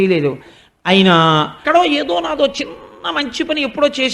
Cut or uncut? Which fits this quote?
cut